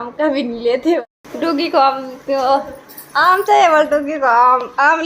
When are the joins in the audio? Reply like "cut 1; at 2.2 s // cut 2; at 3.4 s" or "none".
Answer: cut 1; at 1.0 s